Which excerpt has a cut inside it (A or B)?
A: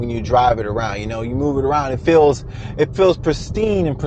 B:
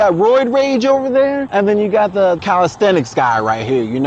B